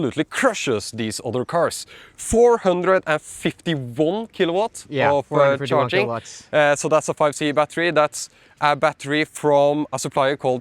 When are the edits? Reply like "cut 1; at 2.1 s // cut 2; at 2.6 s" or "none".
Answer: none